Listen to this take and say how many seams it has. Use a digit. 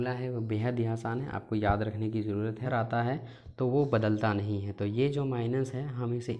1